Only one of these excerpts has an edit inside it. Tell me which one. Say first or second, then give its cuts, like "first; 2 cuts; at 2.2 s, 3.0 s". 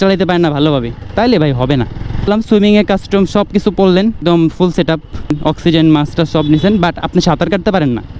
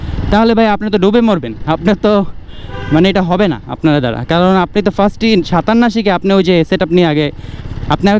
first; 3 cuts; at 2.3 s, 4.2 s, 5.4 s